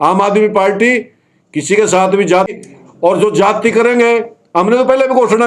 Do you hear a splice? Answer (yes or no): yes